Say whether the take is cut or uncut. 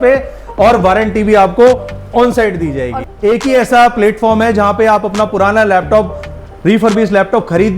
cut